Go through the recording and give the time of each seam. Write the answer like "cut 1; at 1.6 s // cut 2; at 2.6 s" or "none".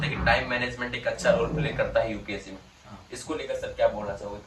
none